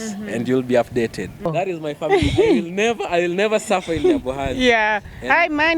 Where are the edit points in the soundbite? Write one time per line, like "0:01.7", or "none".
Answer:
0:01.5